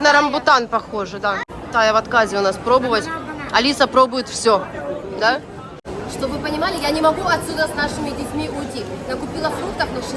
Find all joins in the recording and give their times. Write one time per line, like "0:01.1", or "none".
0:01.5
0:05.9